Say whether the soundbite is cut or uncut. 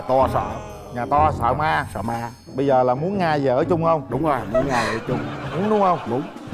uncut